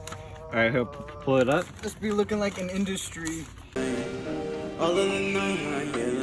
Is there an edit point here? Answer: yes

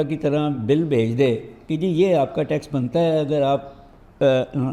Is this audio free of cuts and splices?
yes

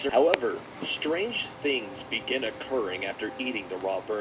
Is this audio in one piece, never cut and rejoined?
yes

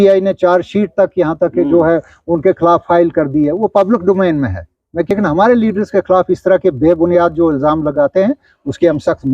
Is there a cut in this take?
yes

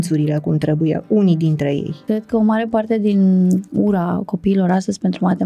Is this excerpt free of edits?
no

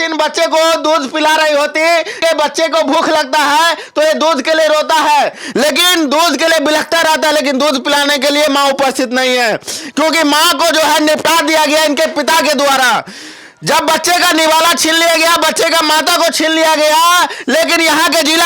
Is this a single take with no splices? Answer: no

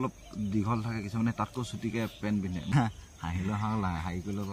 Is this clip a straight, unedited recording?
no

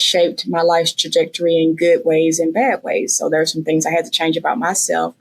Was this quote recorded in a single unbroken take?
yes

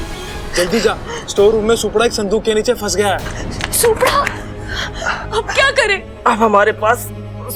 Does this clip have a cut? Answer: no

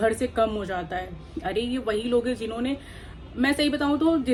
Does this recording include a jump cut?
no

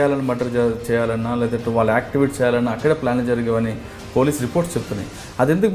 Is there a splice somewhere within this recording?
no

